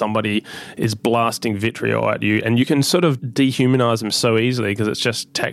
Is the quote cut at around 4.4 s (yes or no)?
no